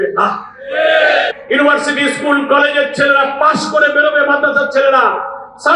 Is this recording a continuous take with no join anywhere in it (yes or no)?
no